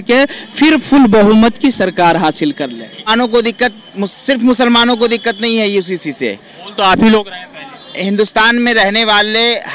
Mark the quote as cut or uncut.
cut